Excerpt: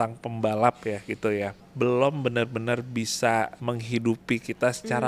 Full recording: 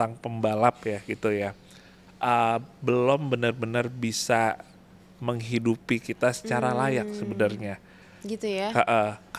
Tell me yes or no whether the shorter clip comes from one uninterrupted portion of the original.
no